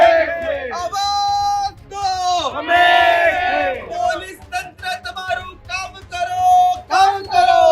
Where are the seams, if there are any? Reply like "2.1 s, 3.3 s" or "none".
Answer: 3.9 s